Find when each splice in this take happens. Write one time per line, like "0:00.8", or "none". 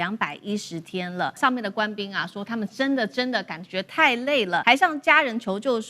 0:01.4
0:04.6